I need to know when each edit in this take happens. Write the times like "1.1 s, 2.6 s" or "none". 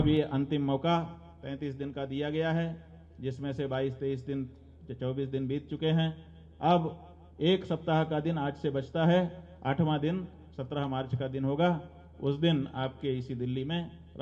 none

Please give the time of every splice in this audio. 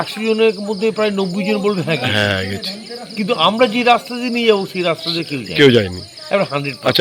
none

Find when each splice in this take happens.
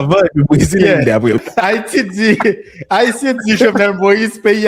1.4 s

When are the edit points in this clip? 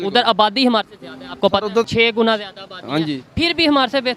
1.9 s

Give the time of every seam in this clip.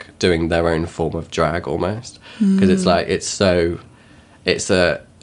none

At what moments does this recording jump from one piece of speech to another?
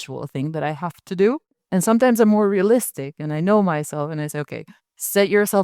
1.6 s

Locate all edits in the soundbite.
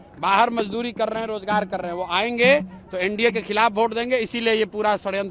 none

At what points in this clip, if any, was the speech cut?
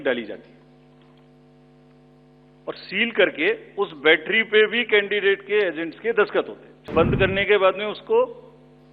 6.9 s

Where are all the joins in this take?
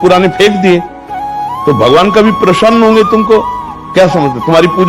none

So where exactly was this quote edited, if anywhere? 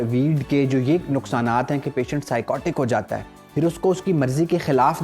none

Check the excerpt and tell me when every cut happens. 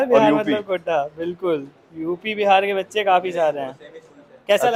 none

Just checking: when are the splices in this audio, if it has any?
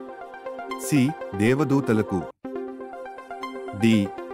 0.9 s

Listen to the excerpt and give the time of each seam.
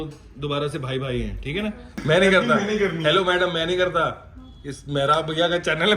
2.0 s

